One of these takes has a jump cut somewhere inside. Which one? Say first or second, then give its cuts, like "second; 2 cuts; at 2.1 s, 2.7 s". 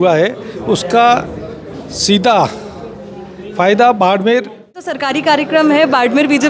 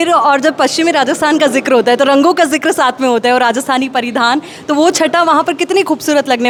first; 1 cut; at 5.0 s